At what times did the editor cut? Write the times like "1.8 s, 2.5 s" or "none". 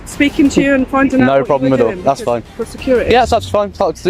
none